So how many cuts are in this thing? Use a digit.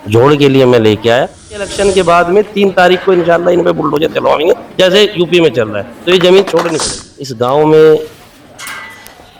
2